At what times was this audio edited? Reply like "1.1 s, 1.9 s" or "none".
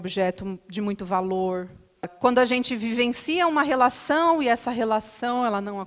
2.1 s